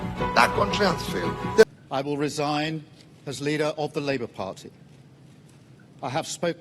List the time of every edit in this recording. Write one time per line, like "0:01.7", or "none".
0:01.6